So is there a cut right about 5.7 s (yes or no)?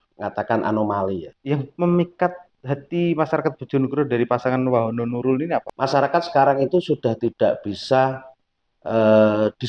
yes